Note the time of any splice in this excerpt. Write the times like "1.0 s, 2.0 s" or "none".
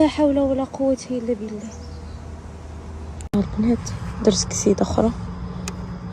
3.1 s